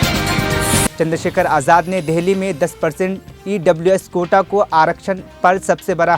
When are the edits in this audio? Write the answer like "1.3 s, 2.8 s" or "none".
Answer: 0.9 s